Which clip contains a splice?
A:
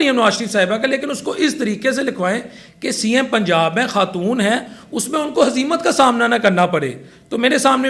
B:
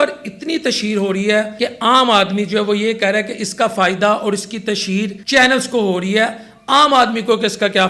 B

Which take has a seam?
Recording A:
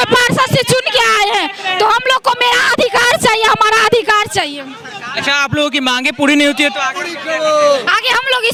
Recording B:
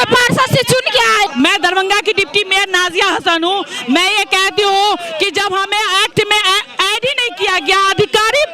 B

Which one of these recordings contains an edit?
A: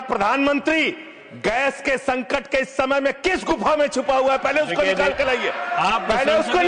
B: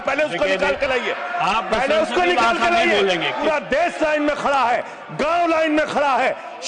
B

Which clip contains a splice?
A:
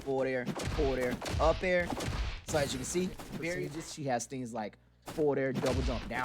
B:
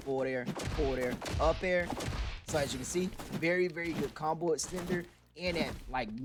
A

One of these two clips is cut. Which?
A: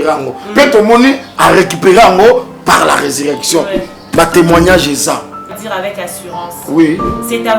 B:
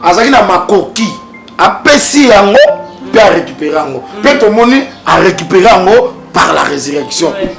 A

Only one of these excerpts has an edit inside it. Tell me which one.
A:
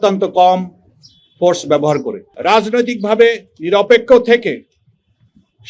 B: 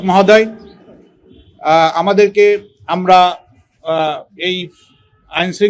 A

